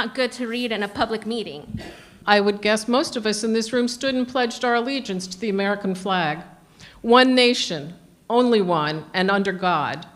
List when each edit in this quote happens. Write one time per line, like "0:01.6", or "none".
0:02.1